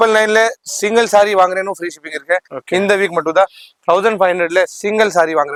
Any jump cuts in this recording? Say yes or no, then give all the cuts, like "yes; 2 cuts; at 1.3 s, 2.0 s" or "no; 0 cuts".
no; 0 cuts